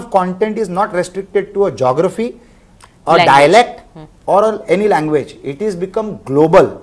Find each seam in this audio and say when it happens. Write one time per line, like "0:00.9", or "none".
none